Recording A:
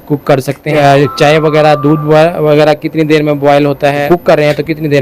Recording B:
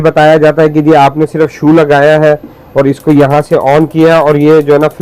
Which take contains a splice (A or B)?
A